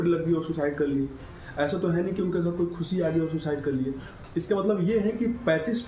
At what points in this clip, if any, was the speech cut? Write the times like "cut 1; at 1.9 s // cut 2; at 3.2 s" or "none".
cut 1; at 4.1 s